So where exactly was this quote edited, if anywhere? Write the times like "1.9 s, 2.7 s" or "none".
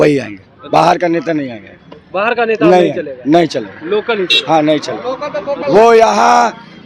none